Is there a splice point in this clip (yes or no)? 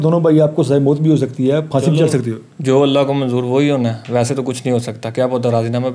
no